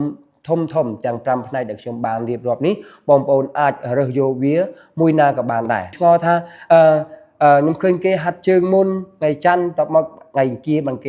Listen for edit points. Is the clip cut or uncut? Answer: cut